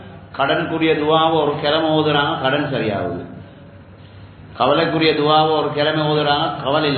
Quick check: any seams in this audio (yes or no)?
no